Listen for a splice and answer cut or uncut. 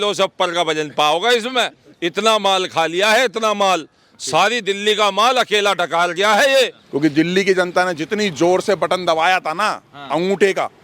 cut